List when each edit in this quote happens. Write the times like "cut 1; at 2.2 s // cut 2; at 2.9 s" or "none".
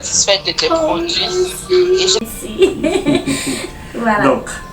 cut 1; at 2.2 s